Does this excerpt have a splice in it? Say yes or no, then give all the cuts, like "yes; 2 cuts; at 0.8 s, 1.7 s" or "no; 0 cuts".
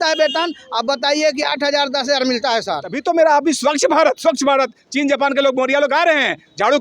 yes; 1 cut; at 2.9 s